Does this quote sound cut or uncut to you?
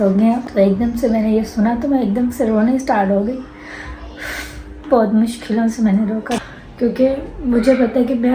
cut